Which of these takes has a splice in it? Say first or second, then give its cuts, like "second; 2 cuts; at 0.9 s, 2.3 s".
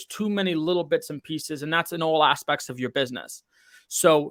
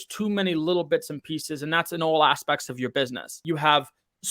second; 1 cut; at 3.4 s